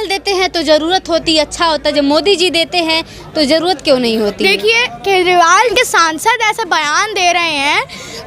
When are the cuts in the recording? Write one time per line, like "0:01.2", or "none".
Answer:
0:05.7